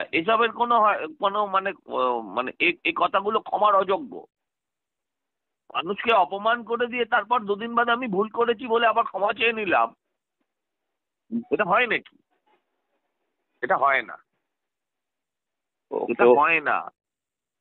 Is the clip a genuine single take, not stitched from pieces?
yes; 0 cuts

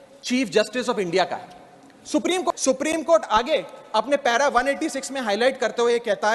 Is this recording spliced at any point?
yes; 1 cut; at 2.5 s

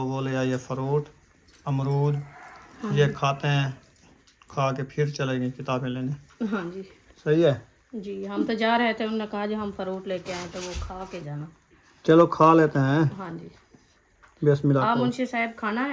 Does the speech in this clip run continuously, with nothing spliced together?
yes; 0 cuts

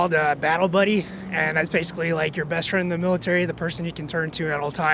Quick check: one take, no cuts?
yes; 0 cuts

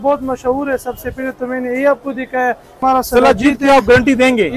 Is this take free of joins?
no; 1 cut; at 2.8 s

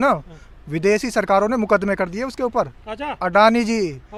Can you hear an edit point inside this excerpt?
no; 0 cuts

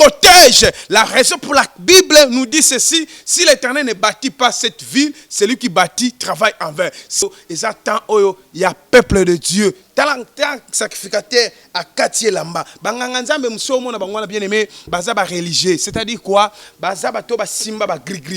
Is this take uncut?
no; 1 cut; at 7.2 s

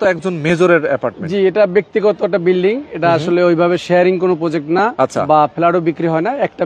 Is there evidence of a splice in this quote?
no; 0 cuts

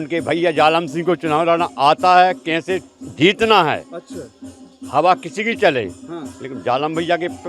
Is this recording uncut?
yes; 0 cuts

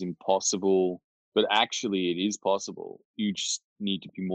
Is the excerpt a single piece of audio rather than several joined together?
yes; 0 cuts

